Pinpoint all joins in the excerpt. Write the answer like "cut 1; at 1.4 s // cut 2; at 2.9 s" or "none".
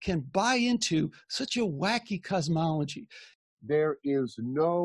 cut 1; at 3.4 s